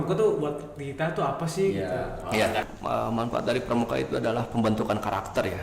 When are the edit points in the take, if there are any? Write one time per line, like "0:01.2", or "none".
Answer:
0:02.7

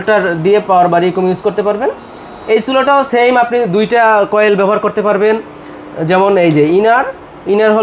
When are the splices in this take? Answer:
none

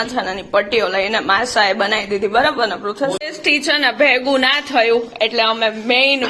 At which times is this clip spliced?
0:03.2

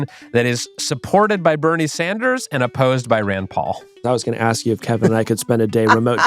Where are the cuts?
0:03.9

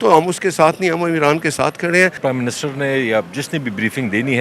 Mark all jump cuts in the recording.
0:02.2

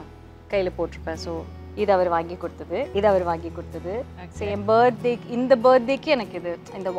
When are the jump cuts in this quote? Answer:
0:02.9

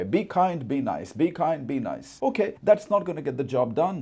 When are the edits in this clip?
0:02.4

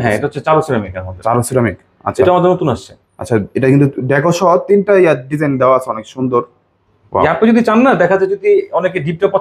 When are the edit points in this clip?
none

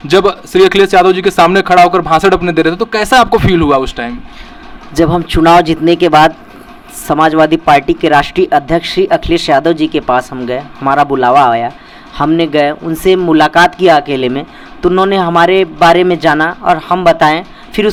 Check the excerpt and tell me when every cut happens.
none

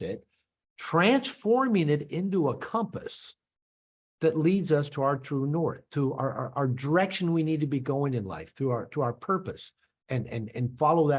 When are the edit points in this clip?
none

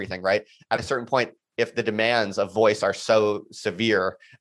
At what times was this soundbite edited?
none

